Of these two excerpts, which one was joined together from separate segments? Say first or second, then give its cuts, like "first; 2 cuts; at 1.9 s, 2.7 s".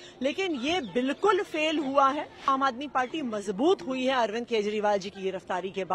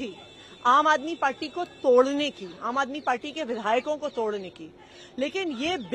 first; 1 cut; at 2.5 s